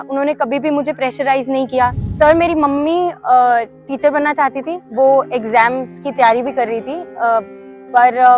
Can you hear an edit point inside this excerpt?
yes; 1 cut; at 2.0 s

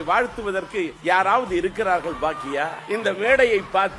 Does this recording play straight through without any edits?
no; 2 cuts; at 1.0 s, 2.8 s

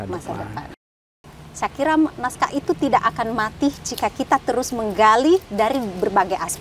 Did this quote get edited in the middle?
yes; 1 cut; at 0.9 s

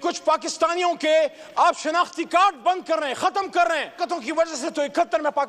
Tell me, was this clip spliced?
yes; 1 cut; at 4.0 s

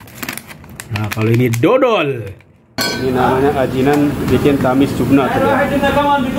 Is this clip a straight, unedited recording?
no; 1 cut; at 2.8 s

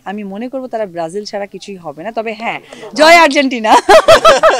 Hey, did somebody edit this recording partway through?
yes; 1 cut; at 2.7 s

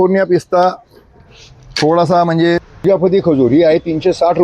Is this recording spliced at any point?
yes; 1 cut; at 2.7 s

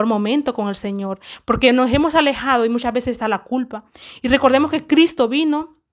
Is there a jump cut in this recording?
no; 0 cuts

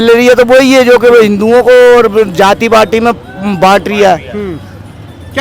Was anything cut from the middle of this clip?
no; 0 cuts

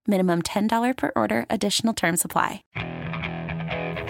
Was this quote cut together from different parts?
yes; 1 cut; at 2.6 s

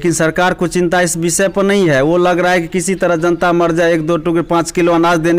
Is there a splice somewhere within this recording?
no; 0 cuts

